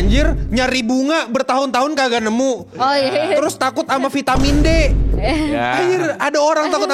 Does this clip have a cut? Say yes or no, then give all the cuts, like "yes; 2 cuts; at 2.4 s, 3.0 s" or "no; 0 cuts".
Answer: no; 0 cuts